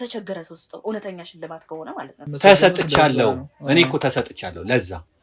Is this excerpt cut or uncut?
cut